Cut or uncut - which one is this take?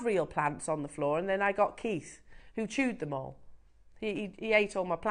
uncut